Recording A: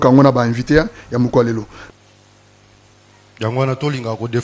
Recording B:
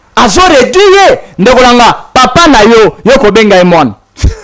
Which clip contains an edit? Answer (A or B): A